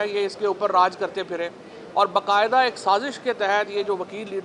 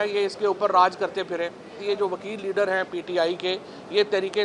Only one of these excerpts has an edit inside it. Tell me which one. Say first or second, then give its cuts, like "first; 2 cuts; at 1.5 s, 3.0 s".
second; 1 cut; at 1.8 s